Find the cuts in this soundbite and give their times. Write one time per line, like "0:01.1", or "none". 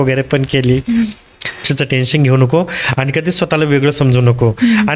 0:01.7